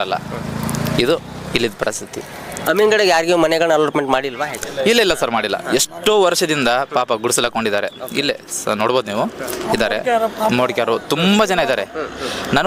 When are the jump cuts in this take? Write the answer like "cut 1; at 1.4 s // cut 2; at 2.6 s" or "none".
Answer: none